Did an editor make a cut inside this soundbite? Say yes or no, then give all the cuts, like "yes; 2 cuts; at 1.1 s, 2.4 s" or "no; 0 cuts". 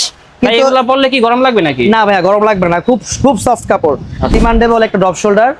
yes; 1 cut; at 4.4 s